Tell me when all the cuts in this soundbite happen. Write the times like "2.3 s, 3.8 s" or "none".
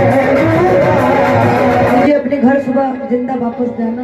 2.0 s